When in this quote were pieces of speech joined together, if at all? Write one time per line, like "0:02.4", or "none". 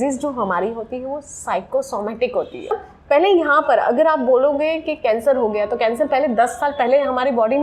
0:02.7